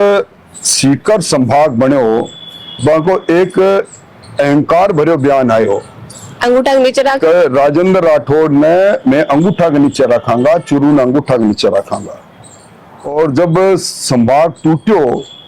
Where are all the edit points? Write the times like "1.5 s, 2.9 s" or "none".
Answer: none

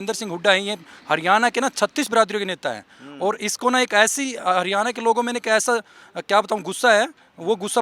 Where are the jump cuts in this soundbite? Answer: none

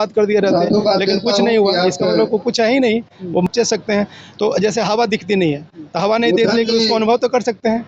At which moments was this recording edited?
3.5 s

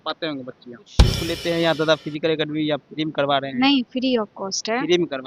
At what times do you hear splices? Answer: 1.3 s

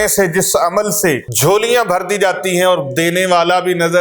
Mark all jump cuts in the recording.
1.3 s

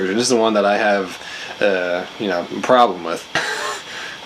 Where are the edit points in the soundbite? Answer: 3.3 s

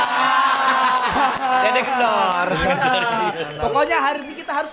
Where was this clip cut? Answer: none

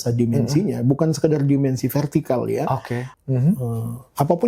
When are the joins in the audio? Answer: 3.0 s

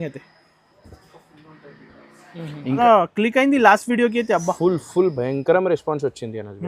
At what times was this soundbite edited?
2.8 s

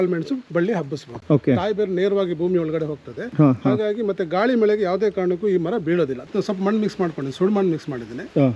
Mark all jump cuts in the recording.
1.1 s, 6.2 s

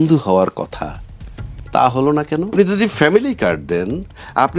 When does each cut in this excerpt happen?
2.5 s

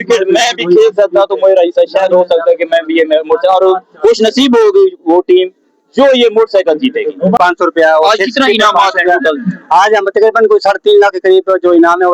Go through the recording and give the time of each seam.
7.4 s

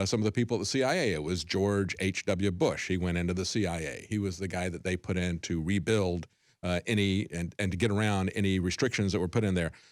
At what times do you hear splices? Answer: none

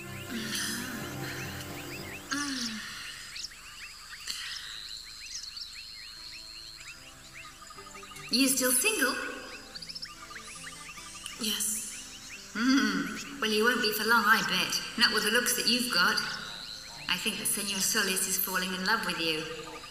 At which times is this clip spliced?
none

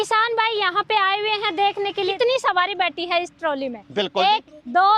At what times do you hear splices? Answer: 2.1 s

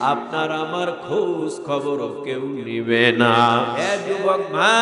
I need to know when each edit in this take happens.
3.9 s

